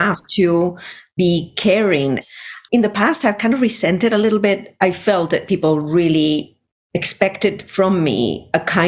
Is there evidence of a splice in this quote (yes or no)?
yes